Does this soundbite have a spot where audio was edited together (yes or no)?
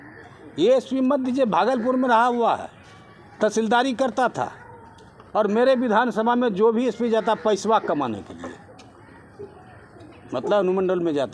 no